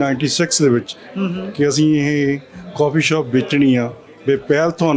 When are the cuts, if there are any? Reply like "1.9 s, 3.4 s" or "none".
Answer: none